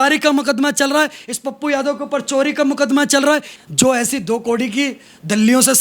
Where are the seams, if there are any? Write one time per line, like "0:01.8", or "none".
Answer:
0:03.6